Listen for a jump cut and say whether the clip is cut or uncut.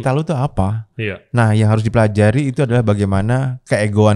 uncut